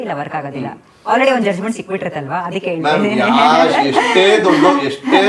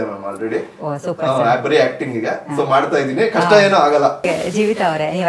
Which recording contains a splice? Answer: second; 1 cut; at 4.2 s

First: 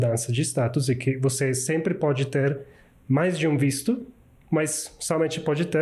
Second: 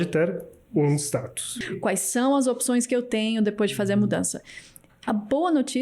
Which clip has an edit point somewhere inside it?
second; 1 cut; at 1.6 s

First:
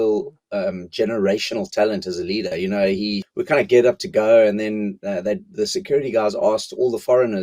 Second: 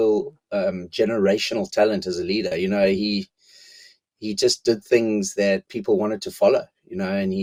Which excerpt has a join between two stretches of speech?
first; 1 cut; at 3.3 s

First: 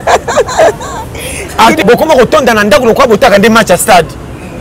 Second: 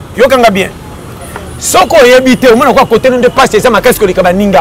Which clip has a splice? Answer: first; 1 cut; at 1.8 s

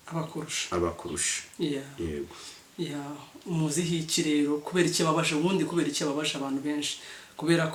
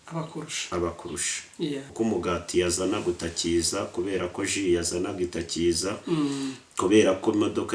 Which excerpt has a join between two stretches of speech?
second; 1 cut; at 1.9 s

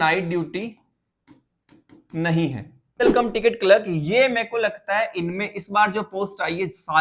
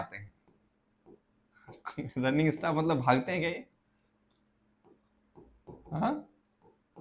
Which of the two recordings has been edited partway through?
first; 1 cut; at 3.0 s

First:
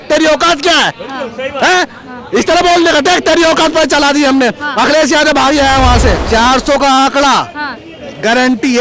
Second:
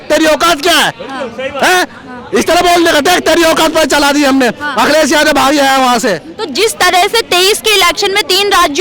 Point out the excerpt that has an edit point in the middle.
first; 1 cut; at 6.2 s

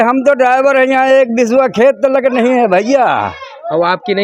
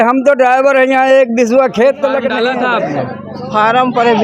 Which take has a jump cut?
second; 1 cut; at 2.2 s

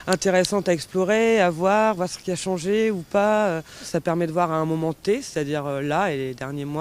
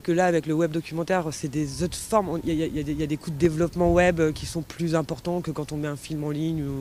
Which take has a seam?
first; 1 cut; at 5.3 s

